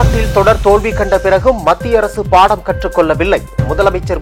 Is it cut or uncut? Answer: uncut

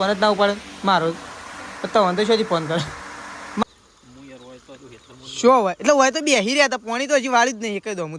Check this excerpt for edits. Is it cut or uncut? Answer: cut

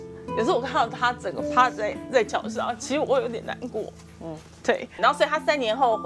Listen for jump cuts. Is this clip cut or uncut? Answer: cut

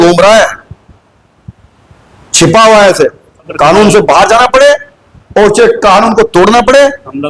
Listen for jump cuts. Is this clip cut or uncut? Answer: cut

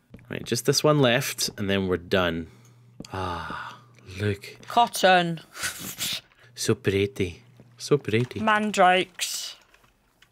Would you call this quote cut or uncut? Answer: cut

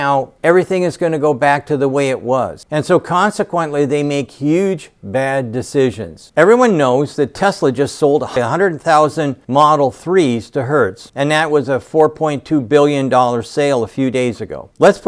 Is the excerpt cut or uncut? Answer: cut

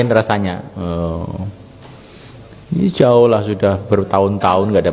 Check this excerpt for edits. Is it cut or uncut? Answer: uncut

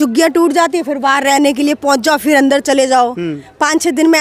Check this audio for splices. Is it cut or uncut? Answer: uncut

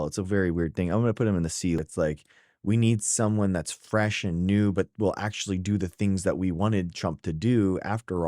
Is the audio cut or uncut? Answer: cut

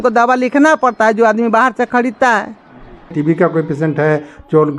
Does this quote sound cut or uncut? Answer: cut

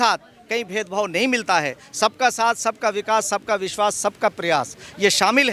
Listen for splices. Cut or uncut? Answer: uncut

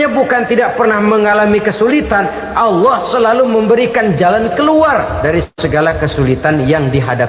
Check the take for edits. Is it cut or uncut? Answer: cut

